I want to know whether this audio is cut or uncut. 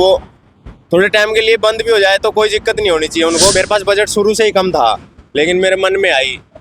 cut